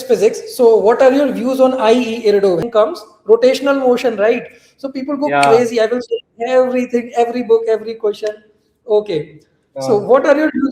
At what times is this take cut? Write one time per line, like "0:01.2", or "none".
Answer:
0:02.6